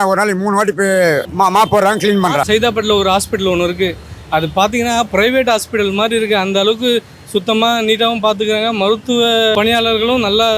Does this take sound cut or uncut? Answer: cut